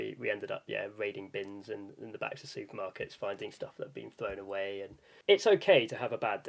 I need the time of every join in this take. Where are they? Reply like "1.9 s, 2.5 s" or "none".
5.1 s